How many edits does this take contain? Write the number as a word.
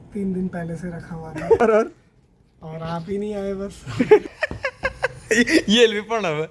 two